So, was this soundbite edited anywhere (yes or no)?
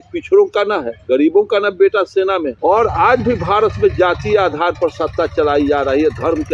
yes